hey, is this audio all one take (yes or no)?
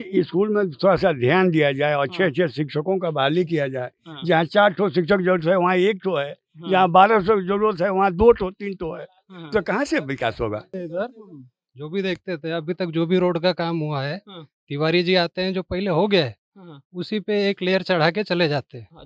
no